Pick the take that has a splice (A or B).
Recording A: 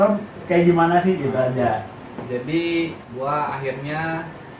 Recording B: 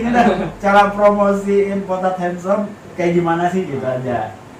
A